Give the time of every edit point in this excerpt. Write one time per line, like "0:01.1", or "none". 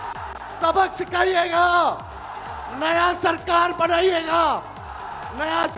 none